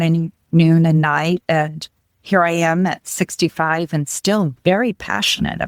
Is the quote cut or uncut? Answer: uncut